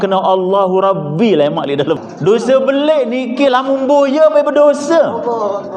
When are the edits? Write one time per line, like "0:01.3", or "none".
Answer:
0:02.0

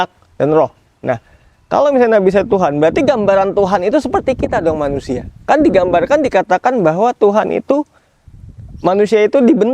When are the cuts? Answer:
none

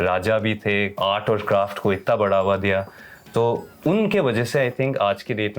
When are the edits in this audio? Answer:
0:00.9

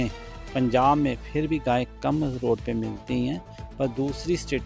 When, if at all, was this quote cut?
none

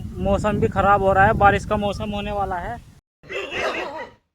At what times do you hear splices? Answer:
0:03.2

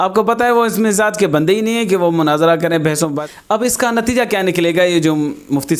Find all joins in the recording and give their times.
0:03.2

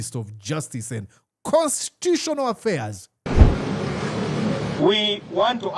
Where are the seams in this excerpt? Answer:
0:03.3

